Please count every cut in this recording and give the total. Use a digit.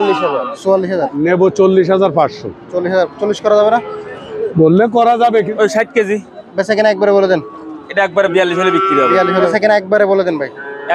3